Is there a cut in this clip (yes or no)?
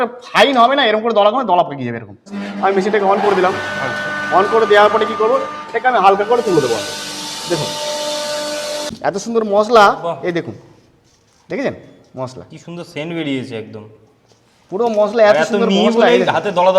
yes